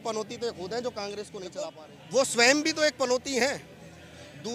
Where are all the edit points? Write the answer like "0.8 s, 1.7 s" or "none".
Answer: 1.8 s